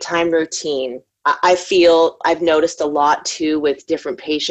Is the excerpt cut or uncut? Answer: cut